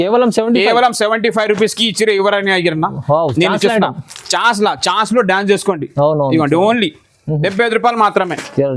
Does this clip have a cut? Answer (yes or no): no